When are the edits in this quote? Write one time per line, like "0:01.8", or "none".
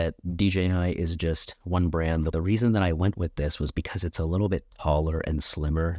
none